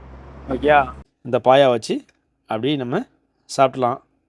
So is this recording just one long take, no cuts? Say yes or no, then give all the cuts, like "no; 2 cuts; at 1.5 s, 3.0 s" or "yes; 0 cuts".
no; 1 cut; at 1.0 s